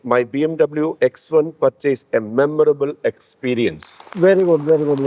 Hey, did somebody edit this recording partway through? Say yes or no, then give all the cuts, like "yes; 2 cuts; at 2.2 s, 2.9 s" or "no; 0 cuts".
no; 0 cuts